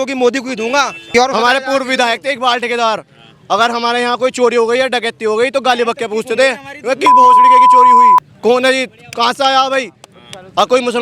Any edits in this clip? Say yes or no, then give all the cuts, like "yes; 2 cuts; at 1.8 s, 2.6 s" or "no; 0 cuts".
yes; 1 cut; at 1.0 s